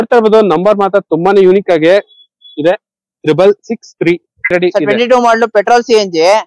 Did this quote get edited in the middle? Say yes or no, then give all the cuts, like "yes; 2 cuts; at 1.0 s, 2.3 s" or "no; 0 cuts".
yes; 1 cut; at 4.5 s